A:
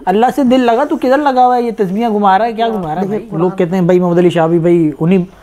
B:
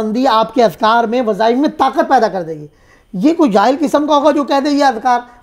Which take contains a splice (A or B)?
A